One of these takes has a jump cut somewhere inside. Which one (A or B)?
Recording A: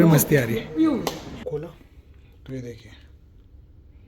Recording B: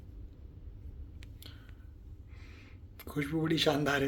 A